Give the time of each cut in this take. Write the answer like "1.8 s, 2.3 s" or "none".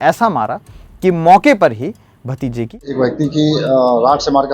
2.8 s